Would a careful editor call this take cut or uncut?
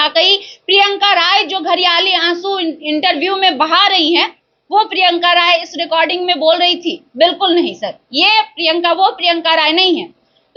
uncut